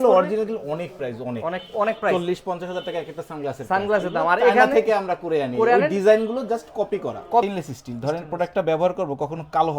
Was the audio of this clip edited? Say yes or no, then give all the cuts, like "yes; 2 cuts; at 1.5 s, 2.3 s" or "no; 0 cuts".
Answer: yes; 1 cut; at 7.4 s